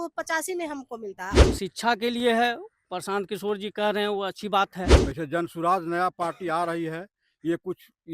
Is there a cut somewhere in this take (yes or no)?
yes